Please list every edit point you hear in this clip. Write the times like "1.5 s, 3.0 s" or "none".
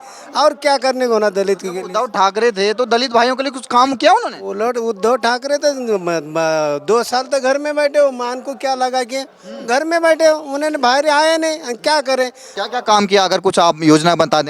12.4 s

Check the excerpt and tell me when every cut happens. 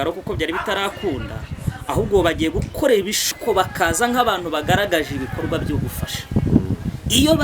3.3 s

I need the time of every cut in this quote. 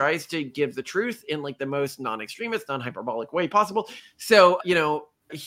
4.0 s

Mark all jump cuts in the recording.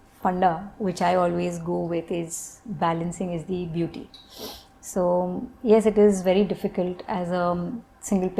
none

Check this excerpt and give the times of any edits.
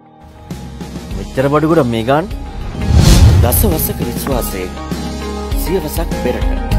2.7 s

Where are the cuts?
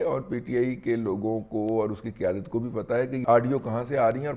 3.2 s

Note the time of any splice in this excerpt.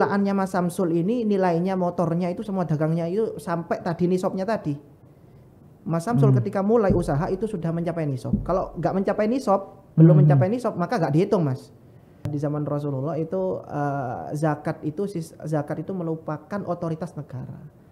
12.3 s

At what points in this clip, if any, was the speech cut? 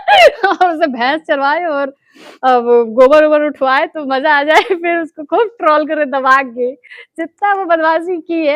none

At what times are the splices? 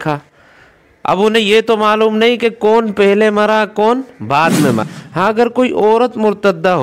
5.3 s

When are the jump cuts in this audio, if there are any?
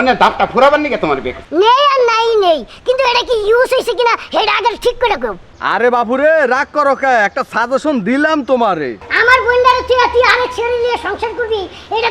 1.3 s, 5.3 s, 9.1 s

